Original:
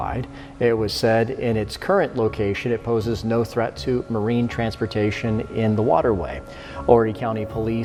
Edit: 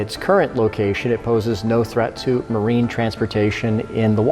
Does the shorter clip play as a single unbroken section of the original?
yes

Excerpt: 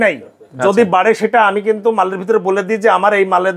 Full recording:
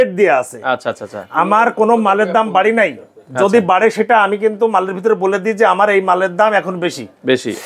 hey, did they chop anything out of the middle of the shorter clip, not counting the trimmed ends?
no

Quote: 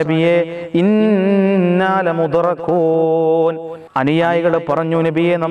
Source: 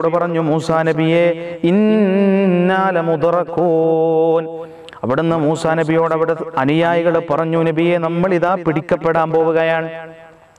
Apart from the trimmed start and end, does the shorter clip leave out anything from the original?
yes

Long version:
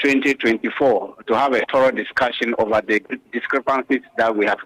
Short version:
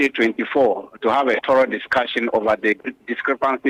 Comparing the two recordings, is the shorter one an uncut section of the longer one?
yes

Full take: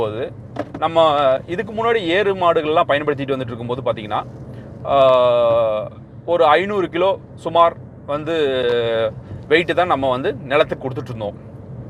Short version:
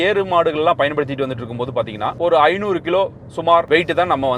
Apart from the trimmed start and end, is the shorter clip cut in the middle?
yes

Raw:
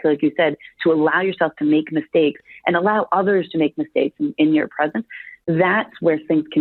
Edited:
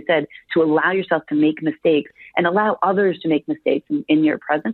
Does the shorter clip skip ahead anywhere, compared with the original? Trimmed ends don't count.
no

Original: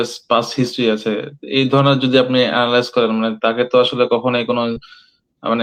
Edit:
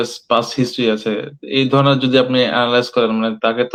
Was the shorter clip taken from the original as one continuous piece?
yes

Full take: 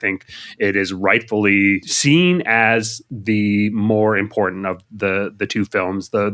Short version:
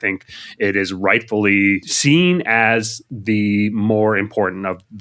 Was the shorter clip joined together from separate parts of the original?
no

